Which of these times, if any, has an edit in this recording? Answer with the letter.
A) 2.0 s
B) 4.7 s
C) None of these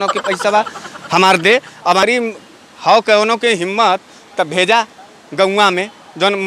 A